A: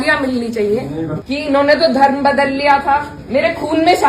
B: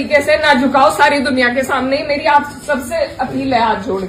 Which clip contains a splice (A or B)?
A